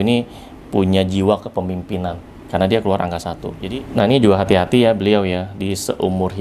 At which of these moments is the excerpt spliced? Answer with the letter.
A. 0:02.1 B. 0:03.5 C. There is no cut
B